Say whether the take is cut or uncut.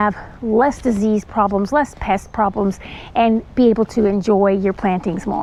uncut